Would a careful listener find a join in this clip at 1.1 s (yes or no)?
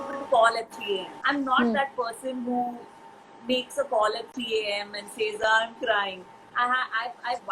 yes